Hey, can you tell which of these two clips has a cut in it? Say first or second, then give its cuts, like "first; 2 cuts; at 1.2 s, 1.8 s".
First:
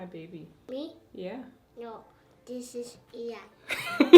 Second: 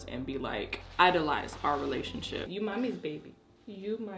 second; 1 cut; at 2.5 s